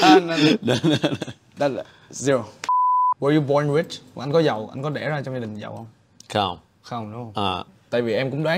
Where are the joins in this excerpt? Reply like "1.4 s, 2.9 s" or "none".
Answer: 2.6 s, 7.6 s